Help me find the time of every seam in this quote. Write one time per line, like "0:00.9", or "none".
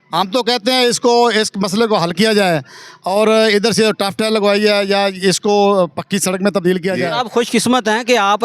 0:07.0